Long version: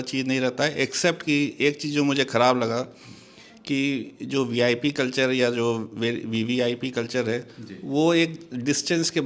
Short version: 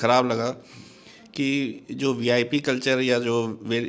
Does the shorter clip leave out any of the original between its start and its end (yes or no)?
no